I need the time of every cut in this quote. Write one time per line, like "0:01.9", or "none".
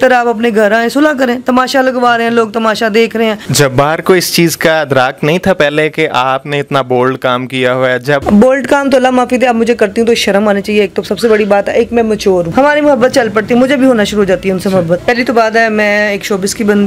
0:03.5
0:08.2
0:12.5
0:15.0